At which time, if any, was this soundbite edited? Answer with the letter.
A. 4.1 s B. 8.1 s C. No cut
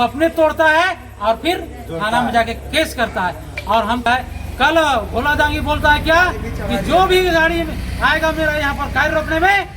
A